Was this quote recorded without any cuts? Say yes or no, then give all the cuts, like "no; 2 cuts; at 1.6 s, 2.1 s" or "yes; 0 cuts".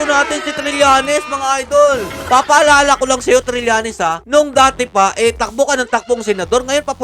no; 1 cut; at 2.1 s